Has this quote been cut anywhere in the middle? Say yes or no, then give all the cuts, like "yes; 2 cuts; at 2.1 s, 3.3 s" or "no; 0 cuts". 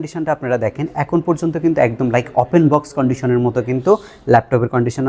no; 0 cuts